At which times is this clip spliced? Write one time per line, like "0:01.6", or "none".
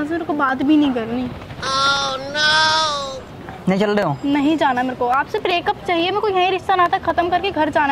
none